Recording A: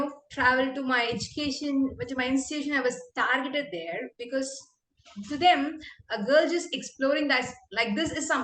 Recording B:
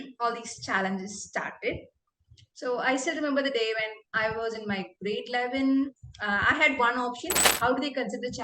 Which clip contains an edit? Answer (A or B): B